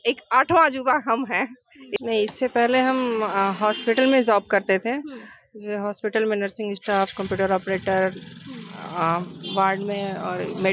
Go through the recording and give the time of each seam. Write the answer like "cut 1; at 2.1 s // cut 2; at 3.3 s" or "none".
cut 1; at 1.8 s

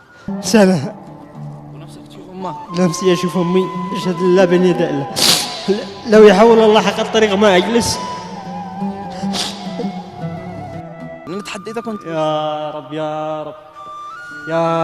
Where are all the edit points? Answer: cut 1; at 11.2 s

